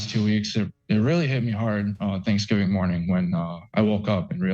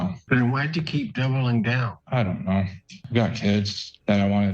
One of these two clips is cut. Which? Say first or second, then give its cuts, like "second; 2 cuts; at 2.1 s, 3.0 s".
second; 2 cuts; at 1.9 s, 3.0 s